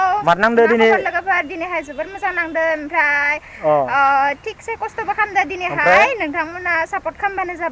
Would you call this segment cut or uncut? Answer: uncut